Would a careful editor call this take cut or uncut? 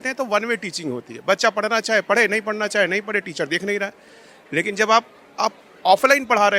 uncut